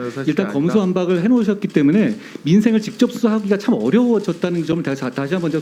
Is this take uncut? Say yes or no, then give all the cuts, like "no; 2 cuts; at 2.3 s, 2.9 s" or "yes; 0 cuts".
yes; 0 cuts